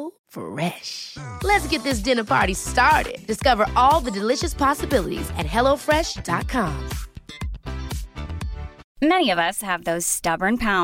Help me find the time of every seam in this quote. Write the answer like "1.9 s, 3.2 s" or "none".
8.9 s